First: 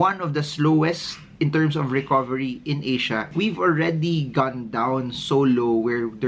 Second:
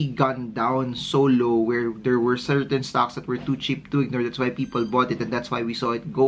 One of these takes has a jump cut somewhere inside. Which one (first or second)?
first